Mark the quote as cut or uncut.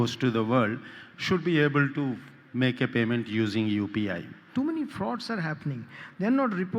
cut